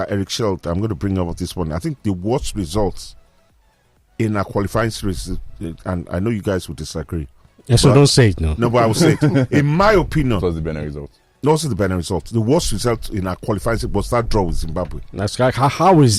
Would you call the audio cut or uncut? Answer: uncut